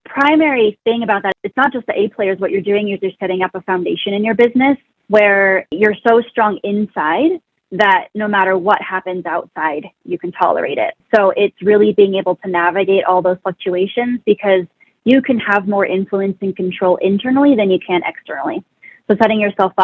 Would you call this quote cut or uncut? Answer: cut